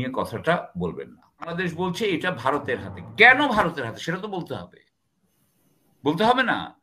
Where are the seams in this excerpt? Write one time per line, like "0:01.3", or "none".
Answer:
0:01.5